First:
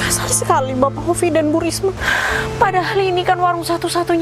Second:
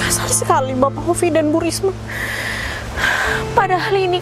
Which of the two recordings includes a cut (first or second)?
first